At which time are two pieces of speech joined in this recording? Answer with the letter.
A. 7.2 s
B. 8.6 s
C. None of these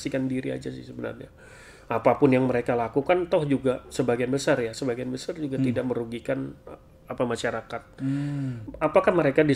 B